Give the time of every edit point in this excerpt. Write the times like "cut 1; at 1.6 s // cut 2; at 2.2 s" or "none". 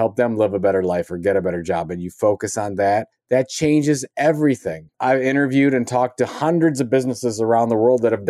cut 1; at 3.1 s // cut 2; at 4.9 s